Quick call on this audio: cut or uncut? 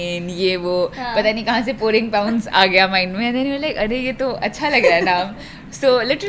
uncut